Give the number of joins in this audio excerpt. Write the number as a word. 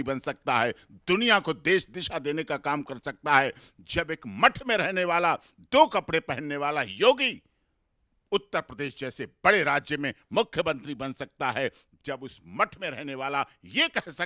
zero